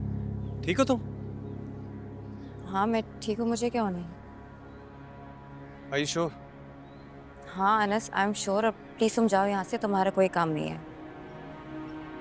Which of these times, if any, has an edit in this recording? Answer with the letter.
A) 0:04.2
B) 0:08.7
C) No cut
C